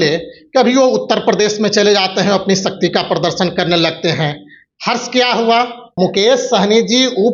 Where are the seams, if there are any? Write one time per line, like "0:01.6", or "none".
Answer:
0:05.8